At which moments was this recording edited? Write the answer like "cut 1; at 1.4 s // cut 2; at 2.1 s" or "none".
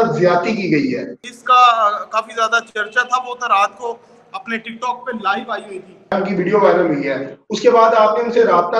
cut 1; at 1.3 s // cut 2; at 6.1 s